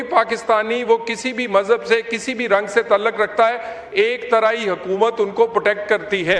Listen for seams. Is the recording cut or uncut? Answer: uncut